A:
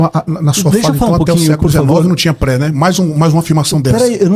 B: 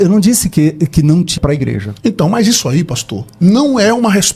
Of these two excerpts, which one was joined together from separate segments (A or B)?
B